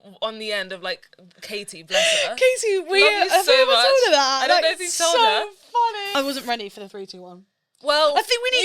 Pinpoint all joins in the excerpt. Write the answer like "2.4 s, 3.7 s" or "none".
6.0 s